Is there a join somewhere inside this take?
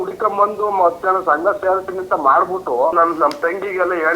yes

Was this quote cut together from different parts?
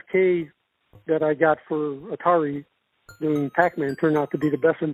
no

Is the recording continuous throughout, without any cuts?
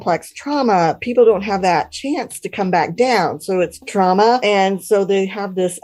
no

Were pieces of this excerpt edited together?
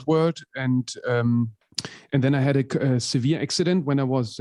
no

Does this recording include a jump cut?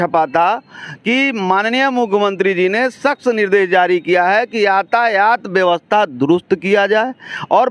no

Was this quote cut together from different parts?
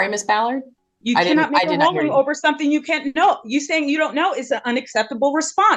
no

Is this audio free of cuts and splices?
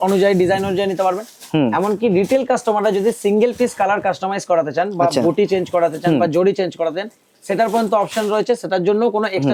yes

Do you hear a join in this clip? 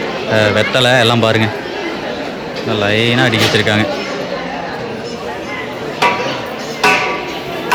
no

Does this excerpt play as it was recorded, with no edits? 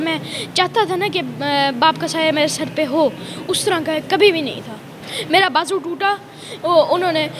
yes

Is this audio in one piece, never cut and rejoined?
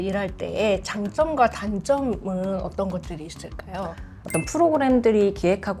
no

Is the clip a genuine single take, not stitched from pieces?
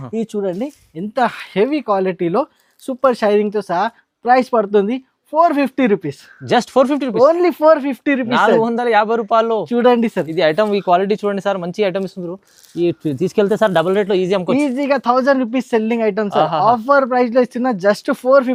yes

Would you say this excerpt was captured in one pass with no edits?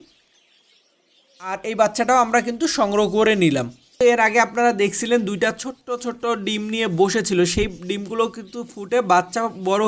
no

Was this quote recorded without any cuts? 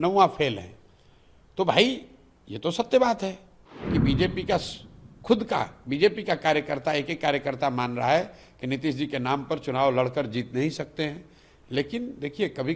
no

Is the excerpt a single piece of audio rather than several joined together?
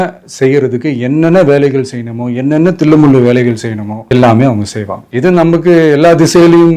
yes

